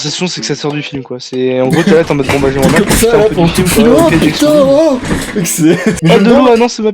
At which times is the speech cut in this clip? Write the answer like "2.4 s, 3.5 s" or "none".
6.0 s